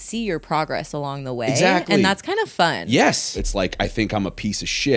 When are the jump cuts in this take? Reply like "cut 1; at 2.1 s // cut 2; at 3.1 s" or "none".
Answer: cut 1; at 3.4 s